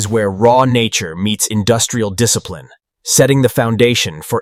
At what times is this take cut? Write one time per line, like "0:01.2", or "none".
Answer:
none